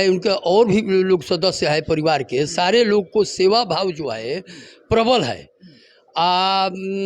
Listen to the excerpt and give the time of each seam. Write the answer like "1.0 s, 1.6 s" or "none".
none